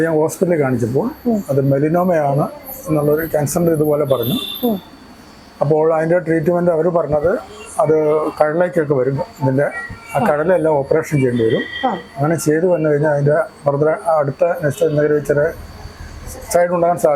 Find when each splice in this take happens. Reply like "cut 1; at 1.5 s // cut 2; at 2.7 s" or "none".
none